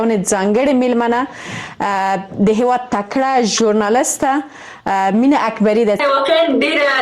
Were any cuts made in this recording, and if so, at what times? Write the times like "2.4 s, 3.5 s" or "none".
6.0 s